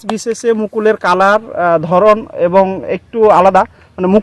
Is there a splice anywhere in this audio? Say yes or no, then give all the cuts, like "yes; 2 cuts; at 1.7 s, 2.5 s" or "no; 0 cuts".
no; 0 cuts